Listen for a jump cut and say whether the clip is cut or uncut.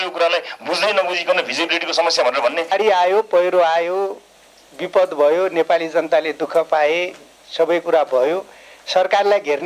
cut